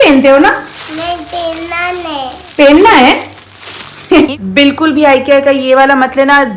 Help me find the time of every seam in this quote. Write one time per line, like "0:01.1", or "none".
0:04.3